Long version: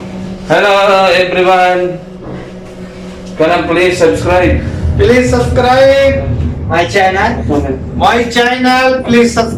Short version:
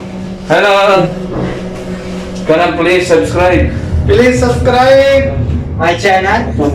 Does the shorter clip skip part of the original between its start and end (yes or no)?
yes